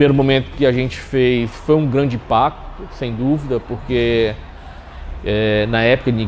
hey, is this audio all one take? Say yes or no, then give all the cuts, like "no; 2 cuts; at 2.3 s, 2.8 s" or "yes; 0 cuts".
yes; 0 cuts